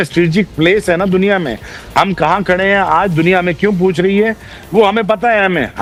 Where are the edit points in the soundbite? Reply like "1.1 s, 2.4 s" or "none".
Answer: none